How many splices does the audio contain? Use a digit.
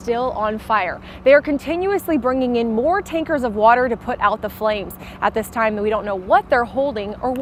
0